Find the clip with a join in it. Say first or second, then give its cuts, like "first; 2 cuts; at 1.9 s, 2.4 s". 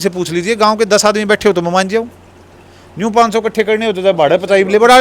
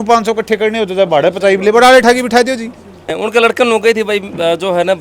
second; 1 cut; at 3.0 s